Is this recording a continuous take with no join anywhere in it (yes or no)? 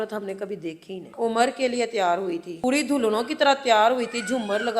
no